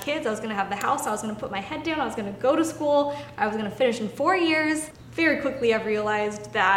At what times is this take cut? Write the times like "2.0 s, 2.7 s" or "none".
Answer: 5.0 s